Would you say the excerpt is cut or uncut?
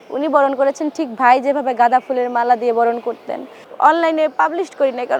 cut